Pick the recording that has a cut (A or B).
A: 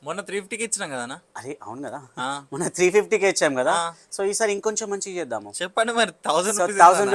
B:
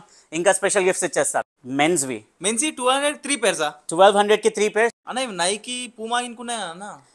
B